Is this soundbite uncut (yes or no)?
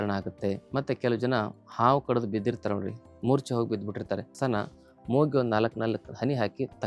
no